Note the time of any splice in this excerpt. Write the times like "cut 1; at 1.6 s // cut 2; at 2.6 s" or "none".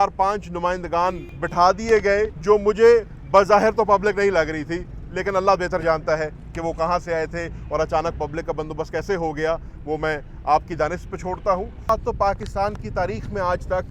cut 1; at 11.9 s